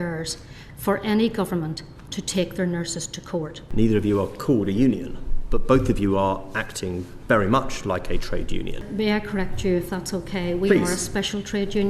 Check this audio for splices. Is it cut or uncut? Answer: cut